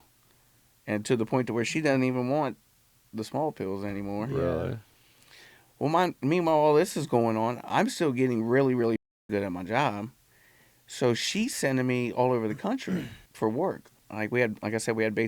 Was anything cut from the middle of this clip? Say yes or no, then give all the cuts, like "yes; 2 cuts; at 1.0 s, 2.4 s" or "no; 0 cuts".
yes; 2 cuts; at 13.2 s, 14.0 s